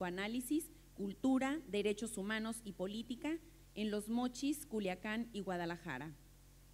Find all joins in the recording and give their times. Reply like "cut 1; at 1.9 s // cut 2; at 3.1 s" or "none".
cut 1; at 3.6 s